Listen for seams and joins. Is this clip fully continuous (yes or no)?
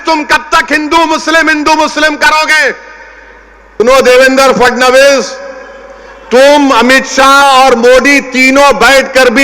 no